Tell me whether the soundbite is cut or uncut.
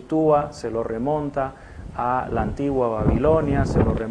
cut